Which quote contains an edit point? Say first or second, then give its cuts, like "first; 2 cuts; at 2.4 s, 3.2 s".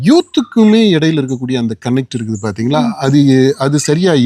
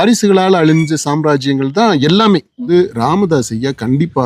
second; 1 cut; at 2.7 s